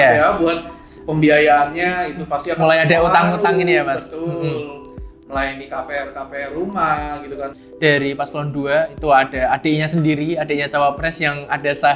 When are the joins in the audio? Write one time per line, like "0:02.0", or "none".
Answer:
0:07.6